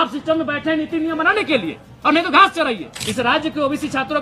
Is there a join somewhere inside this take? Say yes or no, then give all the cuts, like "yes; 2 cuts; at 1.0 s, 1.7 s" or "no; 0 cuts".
yes; 1 cut; at 3.0 s